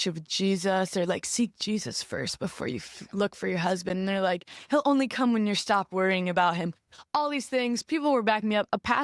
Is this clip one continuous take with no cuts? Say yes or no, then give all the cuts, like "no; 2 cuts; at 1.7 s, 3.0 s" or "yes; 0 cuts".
yes; 0 cuts